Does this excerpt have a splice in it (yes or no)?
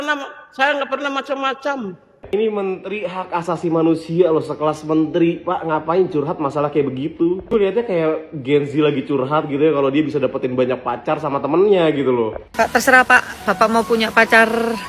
yes